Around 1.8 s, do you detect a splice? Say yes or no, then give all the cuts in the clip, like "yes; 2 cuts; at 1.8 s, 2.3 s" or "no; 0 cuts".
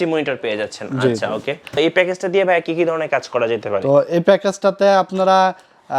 yes; 1 cut; at 1.8 s